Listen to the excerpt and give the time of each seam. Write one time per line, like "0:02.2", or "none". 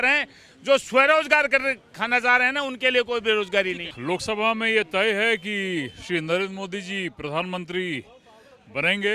none